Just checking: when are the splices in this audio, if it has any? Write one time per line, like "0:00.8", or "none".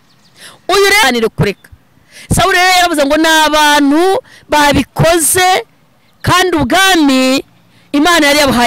0:01.0